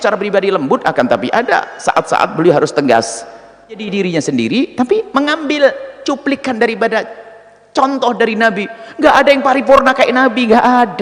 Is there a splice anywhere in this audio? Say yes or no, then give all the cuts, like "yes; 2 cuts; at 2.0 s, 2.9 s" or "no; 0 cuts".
yes; 1 cut; at 3.8 s